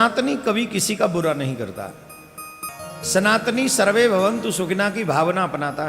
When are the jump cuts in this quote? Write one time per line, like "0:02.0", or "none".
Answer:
0:02.7